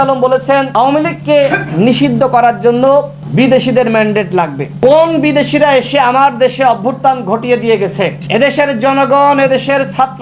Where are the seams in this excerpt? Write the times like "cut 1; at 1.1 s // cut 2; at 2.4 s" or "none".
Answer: none